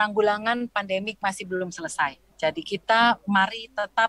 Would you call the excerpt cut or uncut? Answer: cut